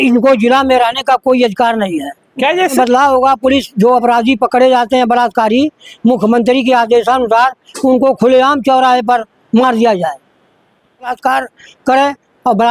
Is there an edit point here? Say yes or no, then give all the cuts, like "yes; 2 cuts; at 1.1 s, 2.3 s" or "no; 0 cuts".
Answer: yes; 2 cuts; at 2.7 s, 11.1 s